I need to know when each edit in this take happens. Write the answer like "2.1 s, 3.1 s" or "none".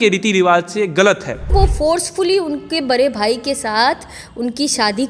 1.5 s